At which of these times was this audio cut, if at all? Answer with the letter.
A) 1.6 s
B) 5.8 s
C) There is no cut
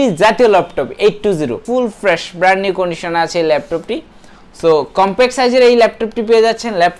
A